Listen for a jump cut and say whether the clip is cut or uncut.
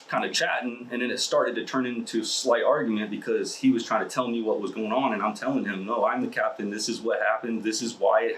uncut